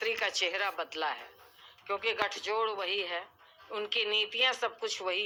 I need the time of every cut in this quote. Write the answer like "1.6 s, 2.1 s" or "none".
none